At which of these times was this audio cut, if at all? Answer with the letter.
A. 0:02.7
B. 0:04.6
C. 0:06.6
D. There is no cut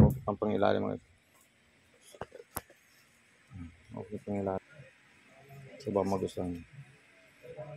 B